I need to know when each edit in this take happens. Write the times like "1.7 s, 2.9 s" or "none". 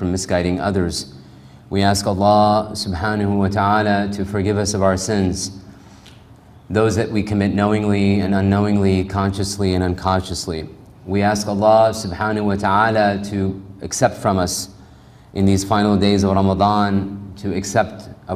1.7 s